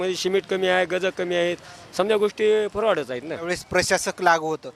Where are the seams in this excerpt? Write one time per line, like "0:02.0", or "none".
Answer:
0:03.6